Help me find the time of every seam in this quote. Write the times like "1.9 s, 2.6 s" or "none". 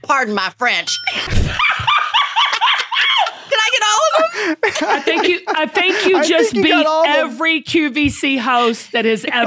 1.1 s